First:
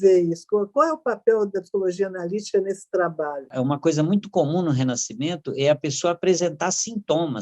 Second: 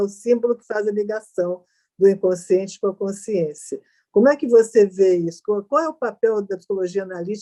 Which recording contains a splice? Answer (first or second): first